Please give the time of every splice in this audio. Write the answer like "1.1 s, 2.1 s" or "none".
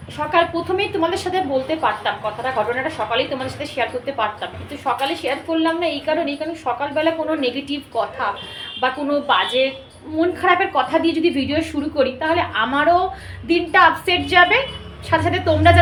none